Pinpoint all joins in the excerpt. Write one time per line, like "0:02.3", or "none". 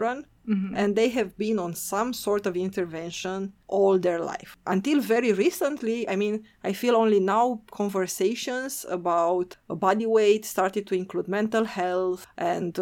none